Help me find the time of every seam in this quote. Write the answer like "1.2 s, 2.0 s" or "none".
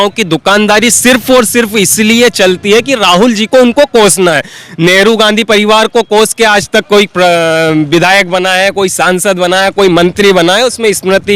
none